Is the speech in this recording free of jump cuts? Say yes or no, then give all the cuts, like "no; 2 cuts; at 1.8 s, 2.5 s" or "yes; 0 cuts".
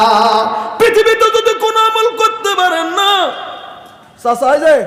yes; 0 cuts